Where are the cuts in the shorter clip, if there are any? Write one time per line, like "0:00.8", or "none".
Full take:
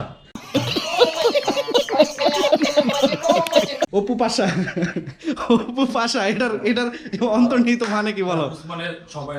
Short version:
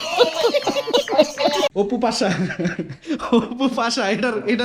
0:01.7